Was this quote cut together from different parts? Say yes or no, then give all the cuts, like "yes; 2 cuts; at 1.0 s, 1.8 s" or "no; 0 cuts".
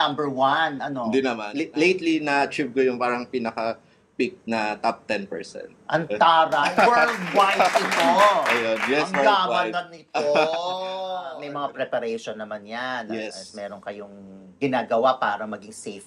yes; 2 cuts; at 1.5 s, 11.4 s